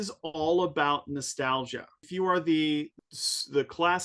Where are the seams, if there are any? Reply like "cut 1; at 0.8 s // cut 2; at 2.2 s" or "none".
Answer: cut 1; at 2.0 s // cut 2; at 3.0 s